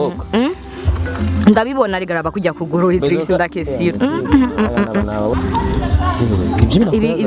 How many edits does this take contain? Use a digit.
1